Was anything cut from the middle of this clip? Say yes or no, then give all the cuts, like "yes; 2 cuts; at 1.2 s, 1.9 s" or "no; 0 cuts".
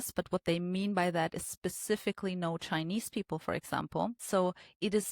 yes; 1 cut; at 4.2 s